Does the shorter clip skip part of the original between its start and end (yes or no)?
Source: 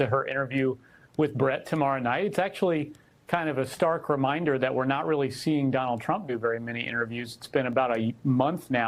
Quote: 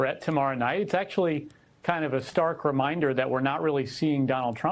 no